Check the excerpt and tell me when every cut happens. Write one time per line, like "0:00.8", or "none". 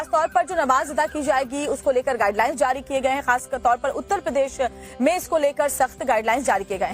0:02.3